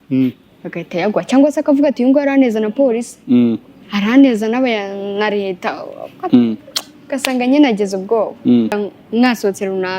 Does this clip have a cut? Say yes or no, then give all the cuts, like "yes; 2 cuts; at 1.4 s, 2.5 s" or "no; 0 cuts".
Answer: yes; 1 cut; at 8.8 s